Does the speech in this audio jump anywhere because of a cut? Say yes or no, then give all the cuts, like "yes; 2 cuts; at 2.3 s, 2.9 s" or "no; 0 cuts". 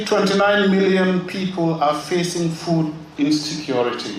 no; 0 cuts